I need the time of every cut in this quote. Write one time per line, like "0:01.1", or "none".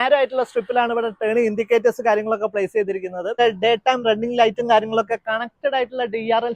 0:03.4